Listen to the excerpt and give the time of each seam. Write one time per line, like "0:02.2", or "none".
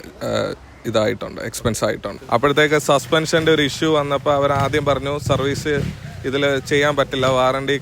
0:02.1

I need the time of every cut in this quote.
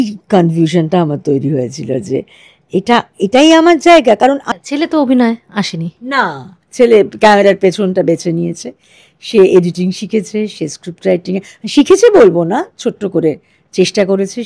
0:04.5

